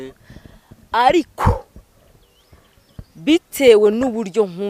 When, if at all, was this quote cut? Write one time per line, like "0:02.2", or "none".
none